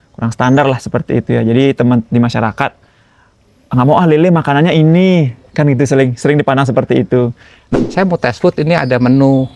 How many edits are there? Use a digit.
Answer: 1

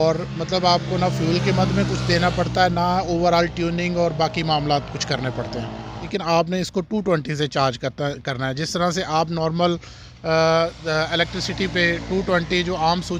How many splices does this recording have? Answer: 1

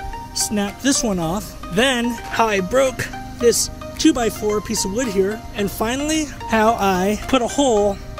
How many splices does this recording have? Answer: 2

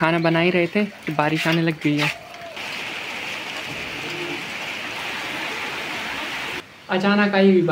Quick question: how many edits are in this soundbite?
2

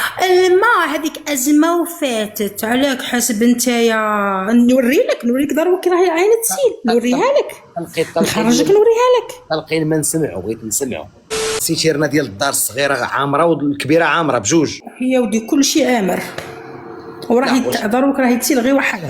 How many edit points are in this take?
2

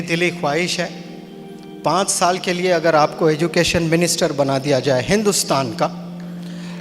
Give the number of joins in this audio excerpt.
0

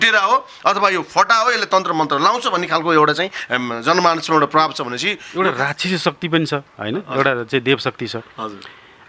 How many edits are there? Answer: 1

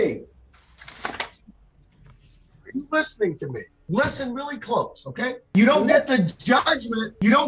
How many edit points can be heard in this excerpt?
1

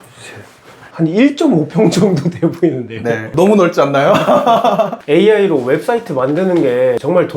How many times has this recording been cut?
1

